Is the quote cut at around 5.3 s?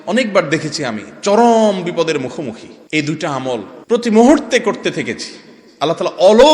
no; 2 cuts; at 2.7 s, 3.7 s

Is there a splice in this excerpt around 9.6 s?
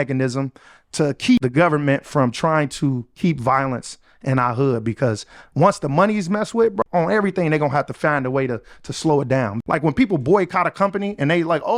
yes; 3 cuts; at 1.4 s, 6.8 s, 9.6 s

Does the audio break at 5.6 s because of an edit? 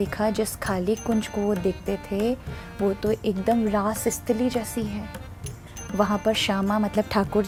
no; 0 cuts

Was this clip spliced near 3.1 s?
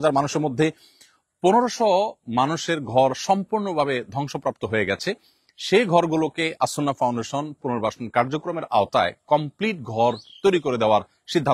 no; 0 cuts

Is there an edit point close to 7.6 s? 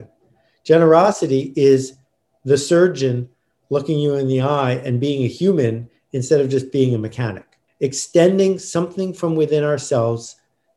yes; 1 cut; at 7.6 s

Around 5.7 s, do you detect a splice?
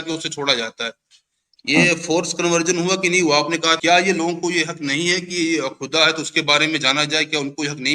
no; 1 cut; at 3.8 s

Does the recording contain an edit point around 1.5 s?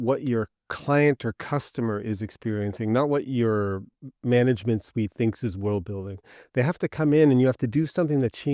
no; 0 cuts

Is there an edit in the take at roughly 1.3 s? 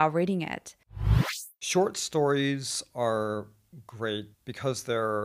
yes; 1 cut; at 1.3 s

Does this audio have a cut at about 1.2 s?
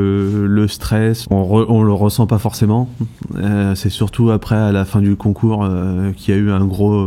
yes; 1 cut; at 1.2 s

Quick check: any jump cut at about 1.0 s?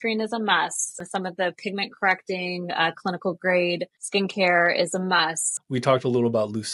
yes; 3 cuts; at 1.0 s, 3.9 s, 5.5 s

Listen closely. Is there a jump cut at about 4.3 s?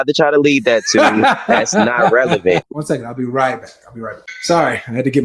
yes; 2 cuts; at 2.8 s, 4.3 s

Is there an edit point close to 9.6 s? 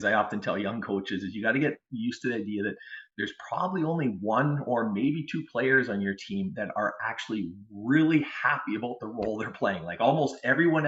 no; 0 cuts

